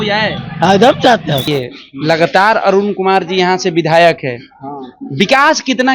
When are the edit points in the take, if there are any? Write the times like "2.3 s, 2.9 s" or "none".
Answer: 1.5 s